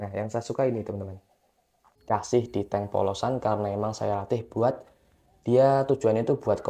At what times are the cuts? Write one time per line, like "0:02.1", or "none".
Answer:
0:01.9